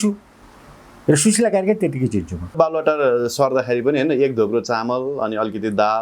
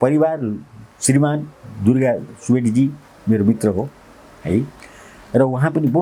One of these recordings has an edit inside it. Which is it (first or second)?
first